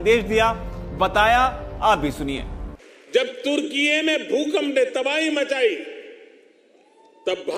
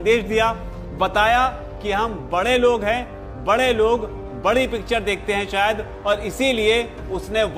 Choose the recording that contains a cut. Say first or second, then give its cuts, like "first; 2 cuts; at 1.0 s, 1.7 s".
first; 1 cut; at 1.7 s